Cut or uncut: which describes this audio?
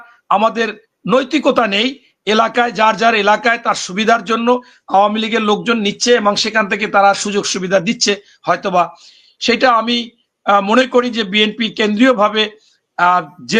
uncut